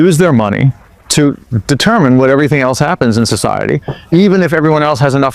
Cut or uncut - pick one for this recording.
cut